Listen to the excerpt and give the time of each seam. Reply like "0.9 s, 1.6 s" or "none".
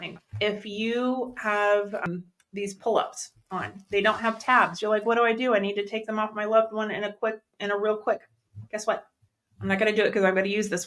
2.0 s